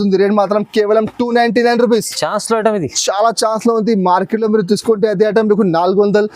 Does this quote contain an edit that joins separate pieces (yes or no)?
no